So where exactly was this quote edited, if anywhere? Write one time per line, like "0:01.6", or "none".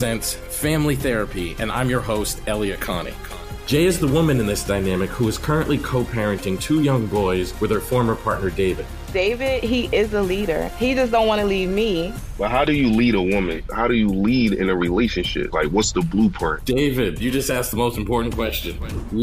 none